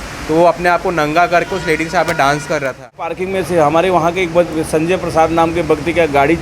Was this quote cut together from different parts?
yes; 1 cut; at 3.2 s

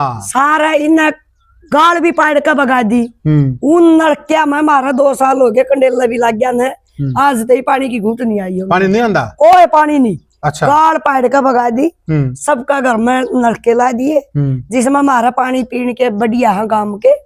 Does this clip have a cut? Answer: no; 0 cuts

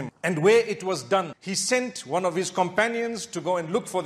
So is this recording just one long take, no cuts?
yes; 0 cuts

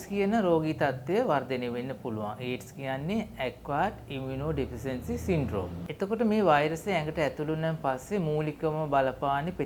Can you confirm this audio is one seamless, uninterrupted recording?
yes; 0 cuts

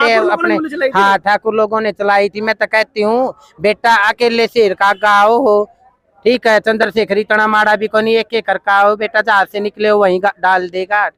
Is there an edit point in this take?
no; 0 cuts

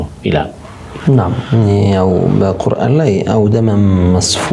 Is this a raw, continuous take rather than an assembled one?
yes; 0 cuts

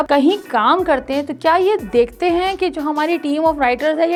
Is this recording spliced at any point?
no; 0 cuts

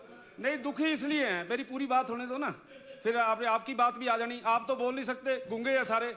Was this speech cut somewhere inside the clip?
no; 0 cuts

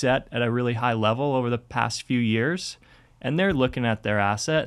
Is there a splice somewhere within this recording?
no; 0 cuts

